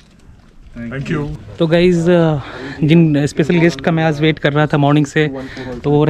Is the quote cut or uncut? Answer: uncut